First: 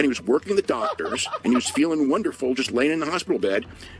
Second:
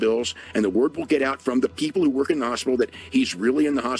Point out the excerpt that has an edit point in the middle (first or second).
first